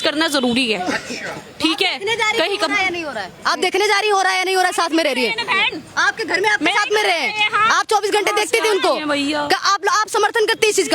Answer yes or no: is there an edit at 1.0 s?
no